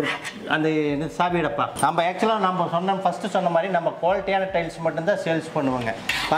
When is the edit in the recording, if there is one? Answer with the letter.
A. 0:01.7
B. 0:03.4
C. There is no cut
A